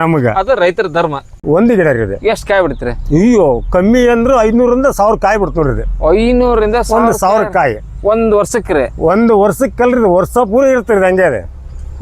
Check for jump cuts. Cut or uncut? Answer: cut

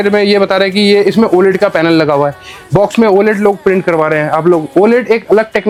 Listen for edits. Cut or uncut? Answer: uncut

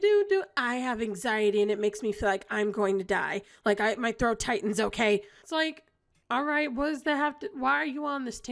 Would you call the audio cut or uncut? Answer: uncut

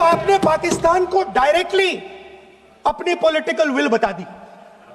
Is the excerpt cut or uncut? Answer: uncut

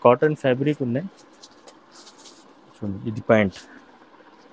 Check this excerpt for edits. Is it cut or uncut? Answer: uncut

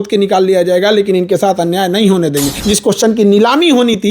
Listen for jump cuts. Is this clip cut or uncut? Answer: cut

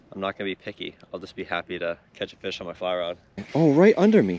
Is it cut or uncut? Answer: cut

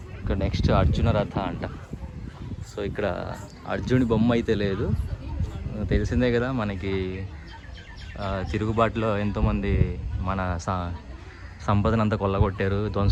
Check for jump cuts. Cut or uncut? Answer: uncut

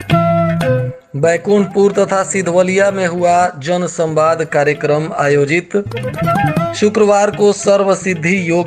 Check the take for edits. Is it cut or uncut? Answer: cut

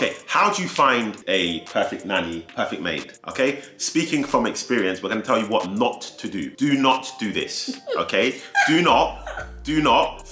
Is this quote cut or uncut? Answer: uncut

